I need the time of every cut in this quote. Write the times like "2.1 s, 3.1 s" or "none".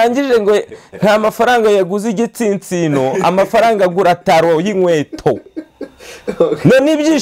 none